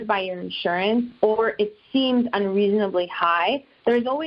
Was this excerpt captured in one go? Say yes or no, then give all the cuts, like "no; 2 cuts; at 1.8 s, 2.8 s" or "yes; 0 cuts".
yes; 0 cuts